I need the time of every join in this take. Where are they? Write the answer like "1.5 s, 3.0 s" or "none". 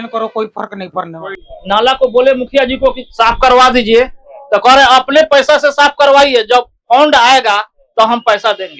1.3 s